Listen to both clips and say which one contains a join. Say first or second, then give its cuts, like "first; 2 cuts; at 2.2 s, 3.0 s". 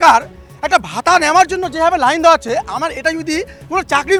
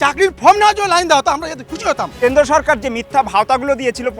second; 1 cut; at 2.1 s